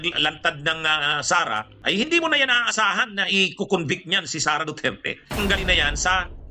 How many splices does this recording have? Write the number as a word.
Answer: two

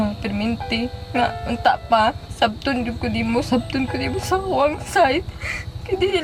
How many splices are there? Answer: zero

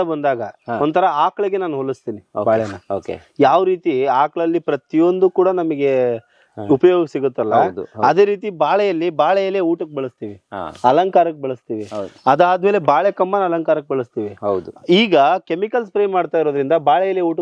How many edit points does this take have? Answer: zero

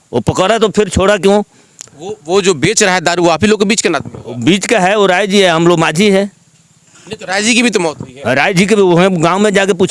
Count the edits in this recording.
zero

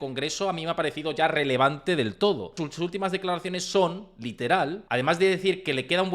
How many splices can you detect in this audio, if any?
two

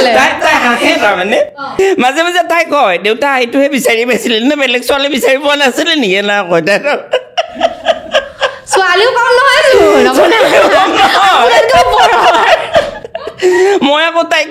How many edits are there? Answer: one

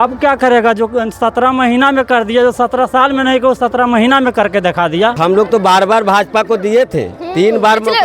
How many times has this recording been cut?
one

